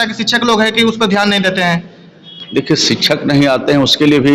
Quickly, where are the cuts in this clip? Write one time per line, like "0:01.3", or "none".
none